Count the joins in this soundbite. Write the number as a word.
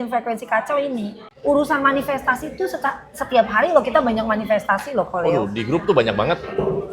one